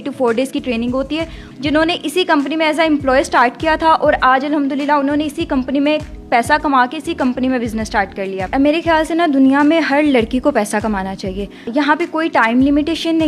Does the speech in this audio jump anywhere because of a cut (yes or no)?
yes